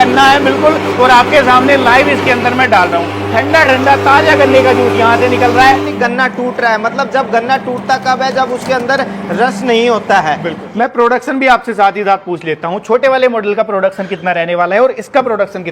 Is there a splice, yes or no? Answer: yes